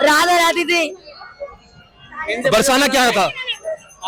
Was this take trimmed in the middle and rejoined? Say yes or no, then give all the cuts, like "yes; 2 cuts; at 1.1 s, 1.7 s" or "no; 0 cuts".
no; 0 cuts